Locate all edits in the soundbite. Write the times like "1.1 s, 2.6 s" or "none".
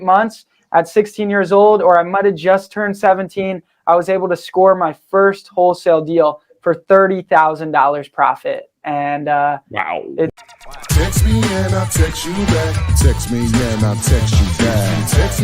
10.4 s